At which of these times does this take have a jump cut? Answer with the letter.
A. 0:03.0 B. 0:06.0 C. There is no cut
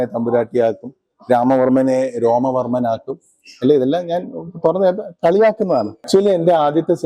B